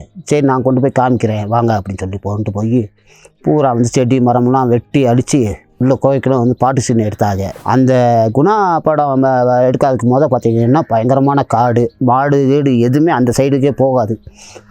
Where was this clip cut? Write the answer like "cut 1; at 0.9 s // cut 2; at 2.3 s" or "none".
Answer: cut 1; at 7.5 s